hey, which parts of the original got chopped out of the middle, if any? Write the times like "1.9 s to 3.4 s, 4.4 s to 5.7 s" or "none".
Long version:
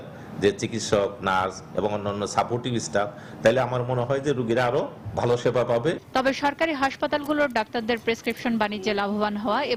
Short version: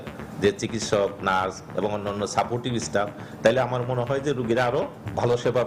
none